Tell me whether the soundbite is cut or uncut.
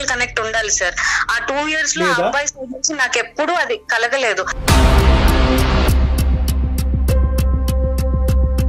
cut